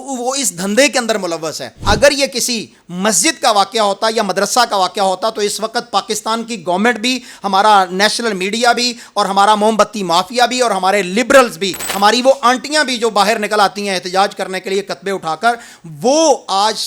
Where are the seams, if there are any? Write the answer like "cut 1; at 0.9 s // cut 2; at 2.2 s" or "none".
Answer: cut 1; at 1.7 s